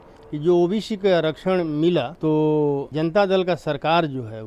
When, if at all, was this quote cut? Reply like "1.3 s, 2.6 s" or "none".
2.1 s, 2.9 s